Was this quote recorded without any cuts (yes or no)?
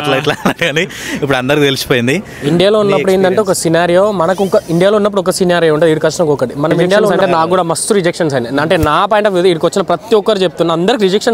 no